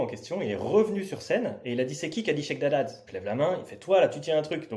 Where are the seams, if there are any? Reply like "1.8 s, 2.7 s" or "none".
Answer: 3.1 s

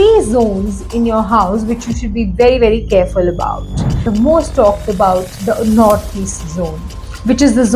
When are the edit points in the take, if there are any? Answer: 4.0 s

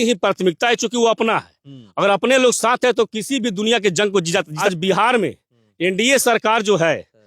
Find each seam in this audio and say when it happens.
4.6 s

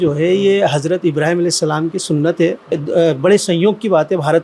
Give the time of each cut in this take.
2.8 s

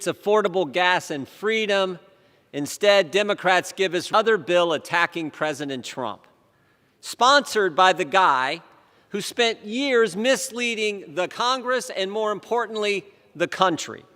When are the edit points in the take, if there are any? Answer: 4.1 s

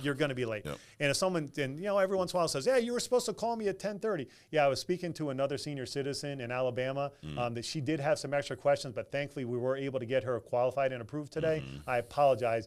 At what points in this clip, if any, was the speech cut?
none

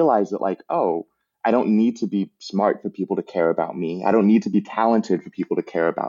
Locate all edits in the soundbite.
none

